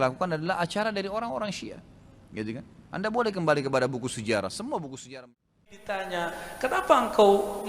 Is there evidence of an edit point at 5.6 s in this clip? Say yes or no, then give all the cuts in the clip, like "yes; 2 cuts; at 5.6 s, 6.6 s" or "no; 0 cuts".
yes; 1 cut; at 5.6 s